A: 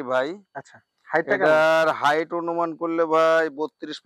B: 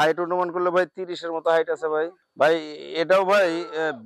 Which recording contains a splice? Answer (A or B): B